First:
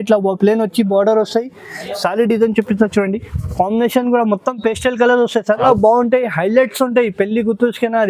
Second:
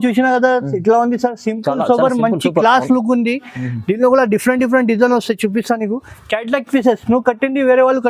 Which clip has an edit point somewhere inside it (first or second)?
first